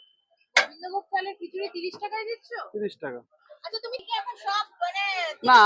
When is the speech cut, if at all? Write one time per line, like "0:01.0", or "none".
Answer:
0:04.0